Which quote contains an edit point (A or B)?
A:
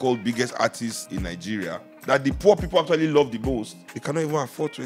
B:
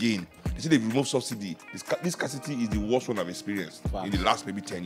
A